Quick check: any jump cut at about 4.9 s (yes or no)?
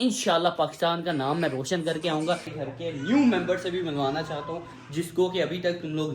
no